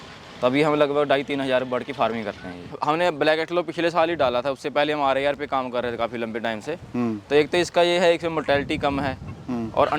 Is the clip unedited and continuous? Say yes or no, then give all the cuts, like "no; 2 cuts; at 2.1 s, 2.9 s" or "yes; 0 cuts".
no; 1 cut; at 2.8 s